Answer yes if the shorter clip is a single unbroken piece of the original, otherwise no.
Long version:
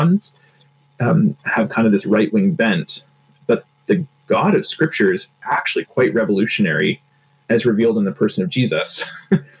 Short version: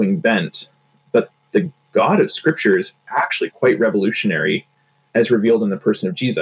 yes